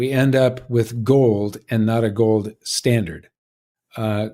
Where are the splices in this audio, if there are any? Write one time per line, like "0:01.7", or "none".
none